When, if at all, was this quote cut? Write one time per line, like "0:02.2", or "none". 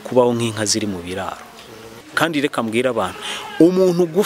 0:02.0